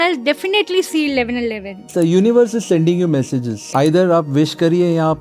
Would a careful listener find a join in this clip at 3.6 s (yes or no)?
yes